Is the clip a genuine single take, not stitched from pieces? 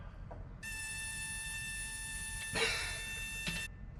yes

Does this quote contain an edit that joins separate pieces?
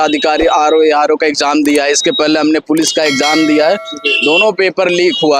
no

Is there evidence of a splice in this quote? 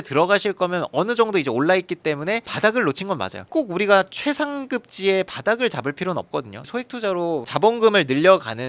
no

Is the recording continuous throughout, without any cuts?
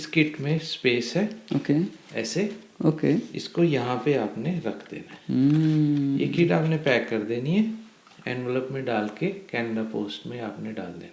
yes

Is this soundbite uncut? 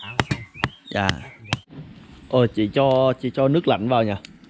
no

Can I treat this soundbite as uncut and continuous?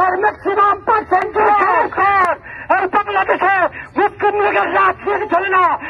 no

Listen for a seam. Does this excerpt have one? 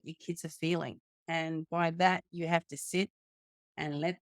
no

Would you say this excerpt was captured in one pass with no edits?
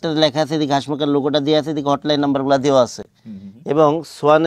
yes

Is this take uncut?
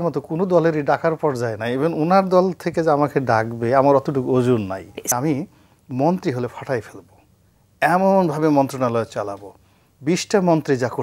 no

